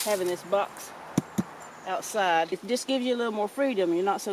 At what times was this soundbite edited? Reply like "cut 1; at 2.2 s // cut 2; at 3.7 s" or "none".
cut 1; at 2.6 s